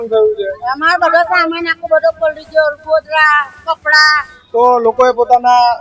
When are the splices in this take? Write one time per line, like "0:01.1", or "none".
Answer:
0:04.4